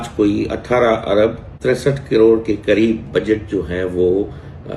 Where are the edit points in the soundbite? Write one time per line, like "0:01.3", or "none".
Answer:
0:01.5